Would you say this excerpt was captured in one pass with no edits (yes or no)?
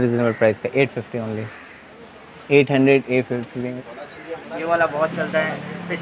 no